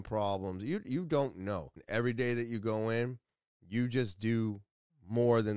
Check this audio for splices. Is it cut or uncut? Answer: cut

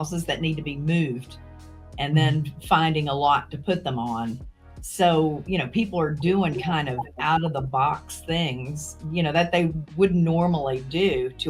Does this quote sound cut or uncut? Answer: uncut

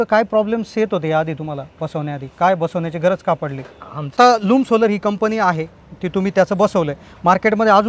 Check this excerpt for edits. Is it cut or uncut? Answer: cut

